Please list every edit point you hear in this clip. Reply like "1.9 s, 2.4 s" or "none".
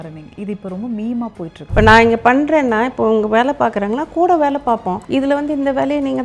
1.5 s, 5.0 s